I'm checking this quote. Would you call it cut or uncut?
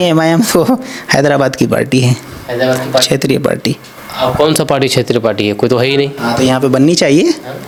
uncut